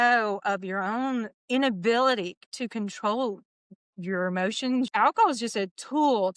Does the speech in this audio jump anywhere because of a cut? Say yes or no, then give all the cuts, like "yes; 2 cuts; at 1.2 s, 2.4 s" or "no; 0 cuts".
yes; 1 cut; at 4.9 s